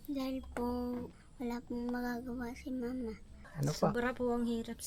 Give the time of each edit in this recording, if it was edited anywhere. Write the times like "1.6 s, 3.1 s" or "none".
1.2 s, 3.4 s

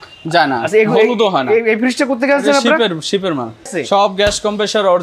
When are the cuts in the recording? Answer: 3.7 s

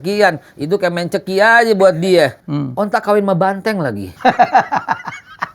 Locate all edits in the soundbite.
2.4 s, 4.0 s

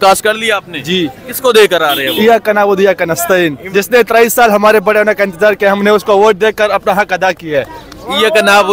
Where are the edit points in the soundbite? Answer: none

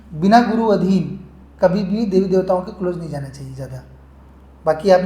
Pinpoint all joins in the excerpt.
none

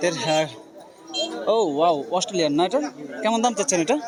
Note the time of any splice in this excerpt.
none

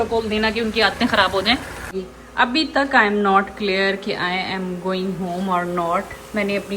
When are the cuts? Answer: 1.9 s

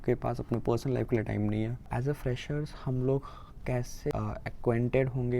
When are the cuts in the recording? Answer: 1.9 s, 4.1 s

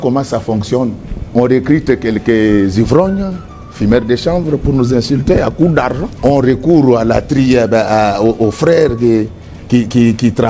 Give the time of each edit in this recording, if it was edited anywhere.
1.1 s, 6.1 s

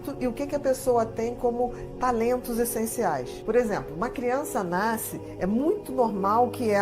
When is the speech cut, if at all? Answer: none

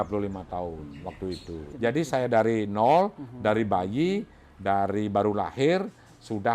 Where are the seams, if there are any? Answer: 1.6 s

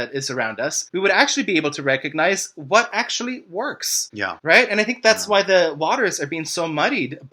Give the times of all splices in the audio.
none

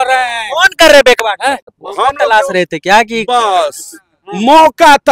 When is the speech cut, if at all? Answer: 1.8 s

